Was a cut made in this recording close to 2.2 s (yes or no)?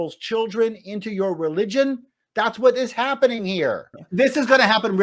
no